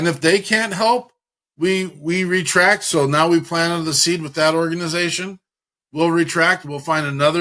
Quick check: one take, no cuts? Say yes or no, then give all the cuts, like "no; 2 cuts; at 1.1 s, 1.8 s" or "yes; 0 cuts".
yes; 0 cuts